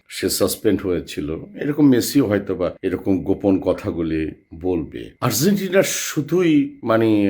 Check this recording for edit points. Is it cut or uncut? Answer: cut